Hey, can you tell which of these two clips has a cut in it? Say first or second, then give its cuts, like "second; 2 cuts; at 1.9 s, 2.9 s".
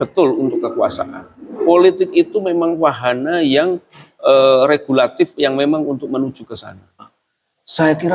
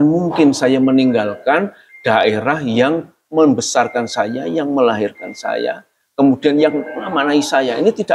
first; 1 cut; at 7.1 s